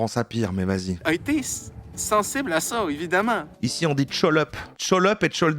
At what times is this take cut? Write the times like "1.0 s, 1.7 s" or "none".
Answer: 0.9 s, 3.5 s, 4.7 s